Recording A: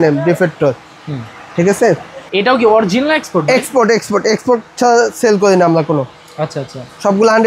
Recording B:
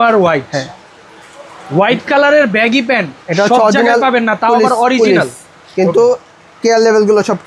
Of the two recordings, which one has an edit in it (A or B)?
A